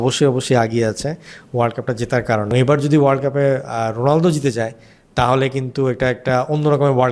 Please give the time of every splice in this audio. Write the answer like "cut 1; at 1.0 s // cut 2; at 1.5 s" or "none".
cut 1; at 2.5 s

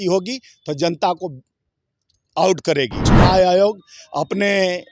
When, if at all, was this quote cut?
cut 1; at 3.1 s

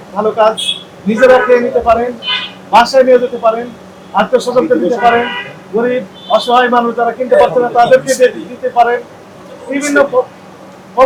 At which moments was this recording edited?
none

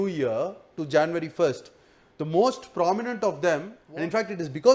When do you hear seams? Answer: cut 1; at 3.8 s

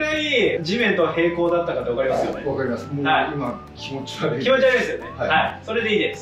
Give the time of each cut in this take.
none

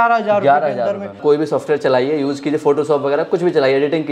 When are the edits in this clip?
cut 1; at 1.2 s

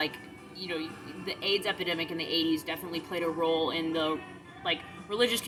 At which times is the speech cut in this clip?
none

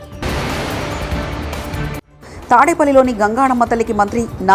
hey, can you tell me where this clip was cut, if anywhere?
cut 1; at 2.1 s

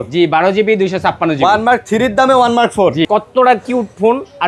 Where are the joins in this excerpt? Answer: cut 1; at 3.1 s

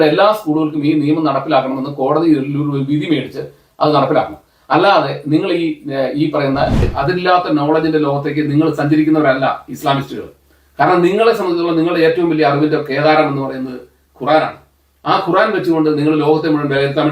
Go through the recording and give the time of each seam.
cut 1; at 6.9 s

